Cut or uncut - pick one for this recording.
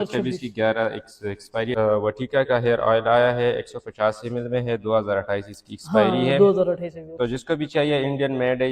cut